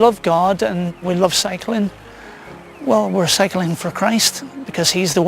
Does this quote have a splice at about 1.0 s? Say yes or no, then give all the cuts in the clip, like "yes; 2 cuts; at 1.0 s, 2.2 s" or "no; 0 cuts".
yes; 1 cut; at 1.0 s